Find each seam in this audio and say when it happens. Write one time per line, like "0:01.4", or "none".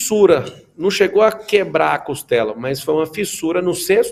none